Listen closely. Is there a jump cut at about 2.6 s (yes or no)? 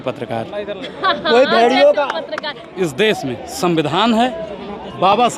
yes